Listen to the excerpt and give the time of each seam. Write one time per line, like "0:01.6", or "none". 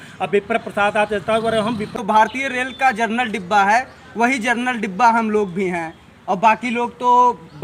0:01.9